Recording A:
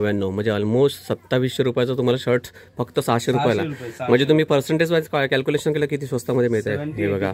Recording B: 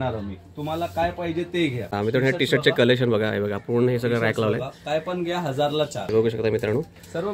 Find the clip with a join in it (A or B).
B